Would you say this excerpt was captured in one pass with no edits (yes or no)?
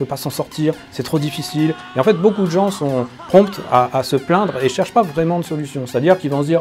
yes